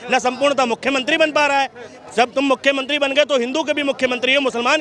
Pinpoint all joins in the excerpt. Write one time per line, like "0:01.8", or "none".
none